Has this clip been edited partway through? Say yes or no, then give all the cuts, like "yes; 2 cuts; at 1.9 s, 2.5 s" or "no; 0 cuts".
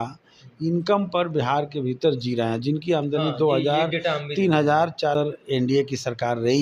yes; 1 cut; at 5.2 s